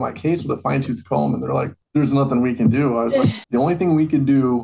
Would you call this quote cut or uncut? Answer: cut